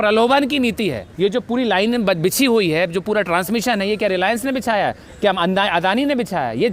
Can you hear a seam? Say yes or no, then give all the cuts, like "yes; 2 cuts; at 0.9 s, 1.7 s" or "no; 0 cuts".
yes; 1 cut; at 1.1 s